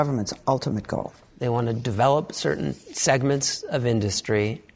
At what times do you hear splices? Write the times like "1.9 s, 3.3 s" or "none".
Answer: none